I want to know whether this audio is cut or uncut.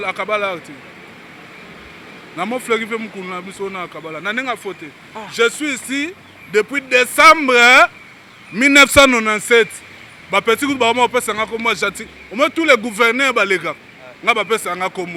uncut